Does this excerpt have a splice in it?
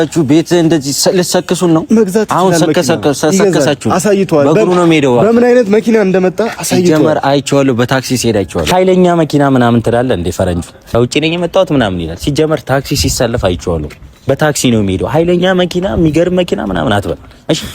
yes; 1 cut; at 10.7 s

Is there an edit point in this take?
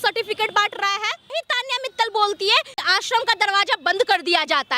yes; 2 cuts; at 1.4 s, 2.7 s

